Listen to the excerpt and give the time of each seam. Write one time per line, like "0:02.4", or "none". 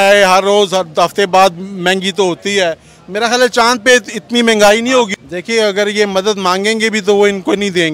0:05.2